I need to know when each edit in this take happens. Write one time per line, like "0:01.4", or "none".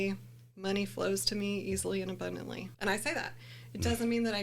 0:02.7